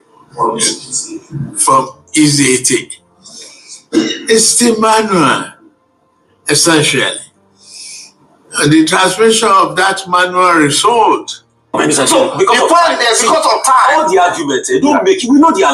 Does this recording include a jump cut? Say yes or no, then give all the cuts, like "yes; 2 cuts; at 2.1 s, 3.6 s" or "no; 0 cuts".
yes; 1 cut; at 11.8 s